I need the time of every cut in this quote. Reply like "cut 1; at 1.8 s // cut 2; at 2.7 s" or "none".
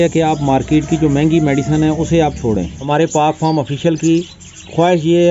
cut 1; at 2.8 s